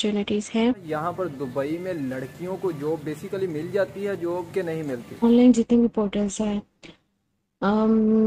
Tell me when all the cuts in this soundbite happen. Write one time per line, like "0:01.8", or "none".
0:00.8
0:05.2